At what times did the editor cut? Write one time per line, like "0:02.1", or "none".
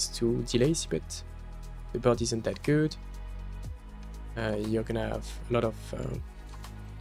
none